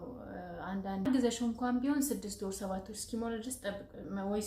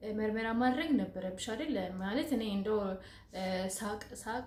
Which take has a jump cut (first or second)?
first